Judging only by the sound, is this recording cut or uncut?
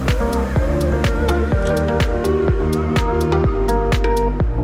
uncut